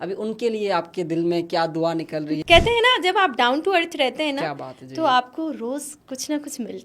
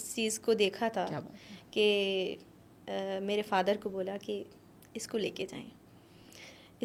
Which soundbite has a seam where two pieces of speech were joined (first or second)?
first